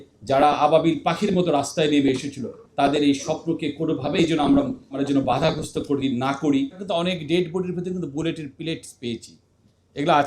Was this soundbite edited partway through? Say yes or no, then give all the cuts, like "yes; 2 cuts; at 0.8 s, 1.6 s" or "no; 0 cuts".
yes; 2 cuts; at 5.0 s, 6.8 s